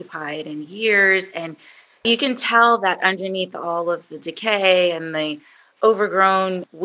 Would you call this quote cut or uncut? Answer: cut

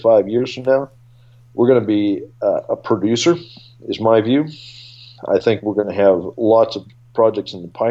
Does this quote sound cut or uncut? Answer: uncut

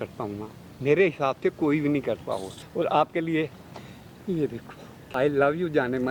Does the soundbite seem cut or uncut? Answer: cut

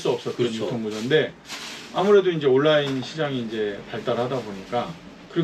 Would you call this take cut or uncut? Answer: uncut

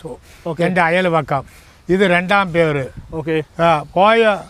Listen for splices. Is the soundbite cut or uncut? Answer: uncut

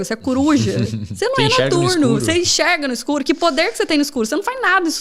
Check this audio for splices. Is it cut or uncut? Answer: uncut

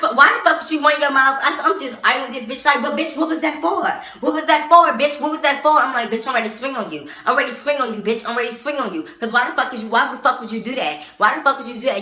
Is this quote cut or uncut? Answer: uncut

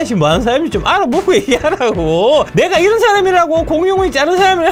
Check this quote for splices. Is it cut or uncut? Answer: uncut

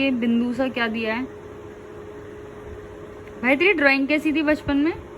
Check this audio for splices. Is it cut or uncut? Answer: uncut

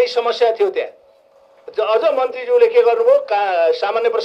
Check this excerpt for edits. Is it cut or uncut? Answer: cut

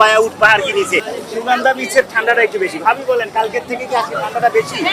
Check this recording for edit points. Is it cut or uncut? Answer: cut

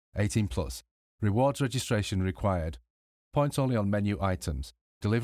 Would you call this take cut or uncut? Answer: uncut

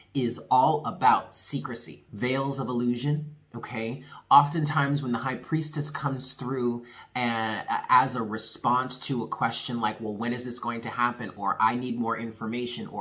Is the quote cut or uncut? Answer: cut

